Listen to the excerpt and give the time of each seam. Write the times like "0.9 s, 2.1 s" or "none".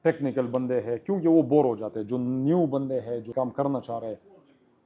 3.3 s

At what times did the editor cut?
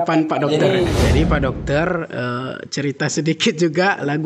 1.0 s

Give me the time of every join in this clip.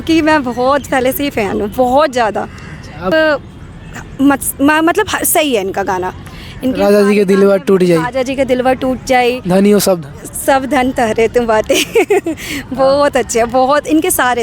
3.1 s

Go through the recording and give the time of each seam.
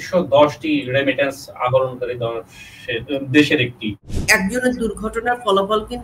4.2 s

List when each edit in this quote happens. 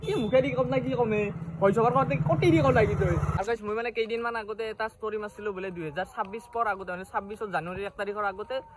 3.3 s

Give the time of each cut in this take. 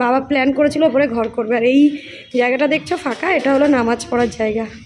none

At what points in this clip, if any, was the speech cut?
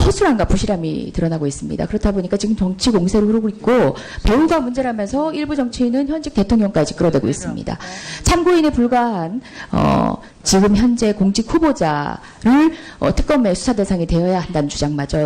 3.7 s

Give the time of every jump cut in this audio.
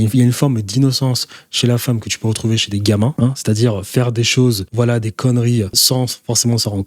3.1 s, 4.6 s, 5.8 s

